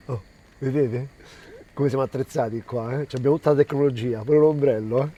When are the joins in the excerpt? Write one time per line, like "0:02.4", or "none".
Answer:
none

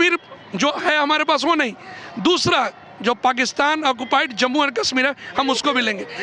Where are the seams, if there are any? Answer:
none

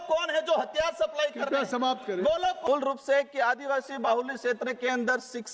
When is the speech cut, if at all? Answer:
0:02.6

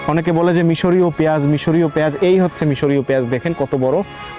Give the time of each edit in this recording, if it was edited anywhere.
none

